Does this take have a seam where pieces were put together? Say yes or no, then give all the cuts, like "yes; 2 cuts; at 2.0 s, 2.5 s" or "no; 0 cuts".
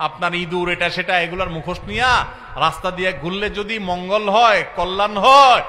no; 0 cuts